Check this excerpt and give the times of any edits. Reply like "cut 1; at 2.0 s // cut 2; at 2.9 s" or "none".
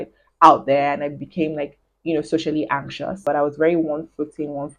cut 1; at 3.2 s